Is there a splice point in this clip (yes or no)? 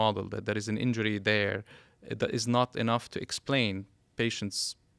no